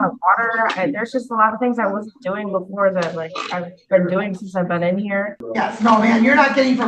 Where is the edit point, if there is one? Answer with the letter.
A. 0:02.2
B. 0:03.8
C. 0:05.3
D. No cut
C